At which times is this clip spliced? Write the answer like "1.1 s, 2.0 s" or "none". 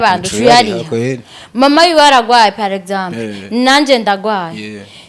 none